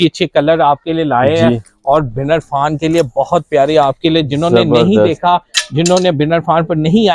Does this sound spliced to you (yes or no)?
no